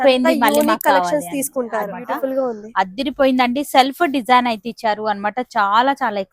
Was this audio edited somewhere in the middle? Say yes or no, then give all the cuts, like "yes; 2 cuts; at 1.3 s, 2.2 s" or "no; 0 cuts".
yes; 1 cut; at 2.0 s